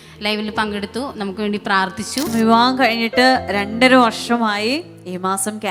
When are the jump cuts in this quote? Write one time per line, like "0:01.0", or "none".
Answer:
0:02.3